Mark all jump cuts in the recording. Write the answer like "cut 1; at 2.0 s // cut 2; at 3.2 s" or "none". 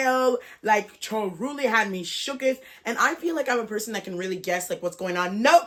none